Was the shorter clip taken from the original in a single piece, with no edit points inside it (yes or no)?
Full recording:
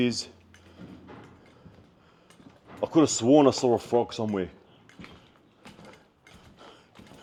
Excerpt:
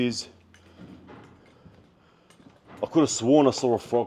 yes